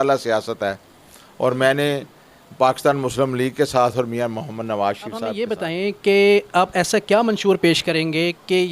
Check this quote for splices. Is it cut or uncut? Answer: cut